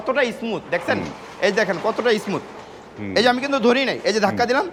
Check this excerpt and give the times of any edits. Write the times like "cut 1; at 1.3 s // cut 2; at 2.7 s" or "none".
none